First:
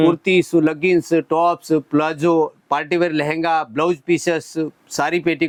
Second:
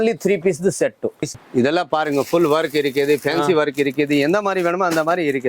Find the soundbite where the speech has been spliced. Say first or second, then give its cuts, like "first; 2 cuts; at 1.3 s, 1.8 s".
second; 1 cut; at 1.4 s